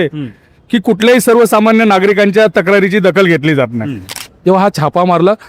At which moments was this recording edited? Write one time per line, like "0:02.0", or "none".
0:04.2